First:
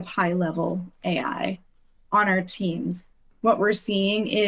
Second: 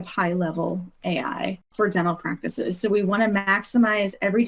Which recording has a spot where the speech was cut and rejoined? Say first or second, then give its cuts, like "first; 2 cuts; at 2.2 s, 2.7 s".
second; 1 cut; at 1.7 s